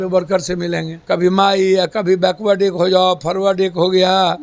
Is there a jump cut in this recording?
yes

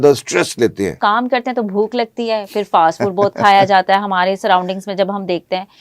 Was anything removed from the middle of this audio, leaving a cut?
yes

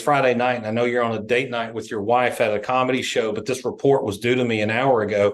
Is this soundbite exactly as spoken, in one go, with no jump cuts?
yes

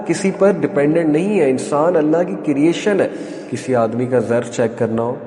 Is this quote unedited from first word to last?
no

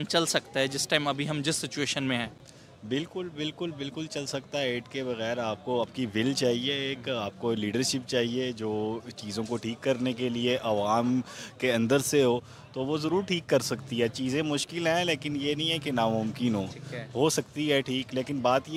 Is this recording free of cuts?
yes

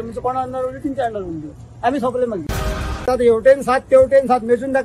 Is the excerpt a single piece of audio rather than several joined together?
no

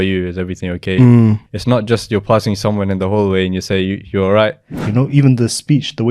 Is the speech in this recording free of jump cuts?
no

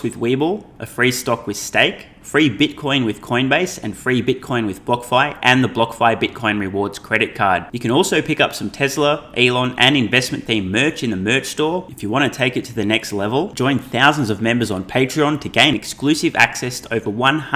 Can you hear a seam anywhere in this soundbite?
no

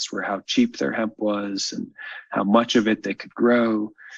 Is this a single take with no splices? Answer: yes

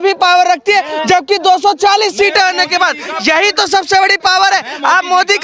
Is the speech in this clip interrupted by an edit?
no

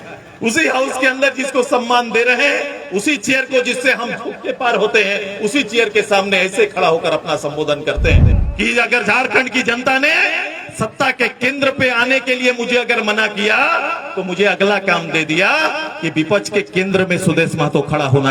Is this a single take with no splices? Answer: no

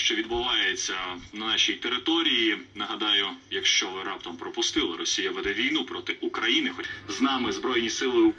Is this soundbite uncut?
no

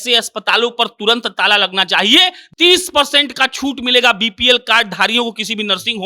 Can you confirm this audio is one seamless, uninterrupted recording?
no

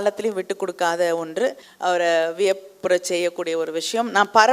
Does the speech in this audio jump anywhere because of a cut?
yes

